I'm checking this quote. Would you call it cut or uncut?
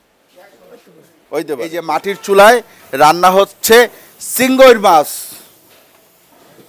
cut